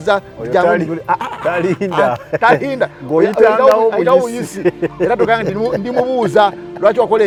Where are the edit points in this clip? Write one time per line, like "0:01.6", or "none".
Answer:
none